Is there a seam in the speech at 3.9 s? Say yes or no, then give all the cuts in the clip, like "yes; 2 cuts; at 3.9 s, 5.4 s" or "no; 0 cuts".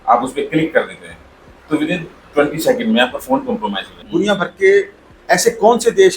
yes; 1 cut; at 3.9 s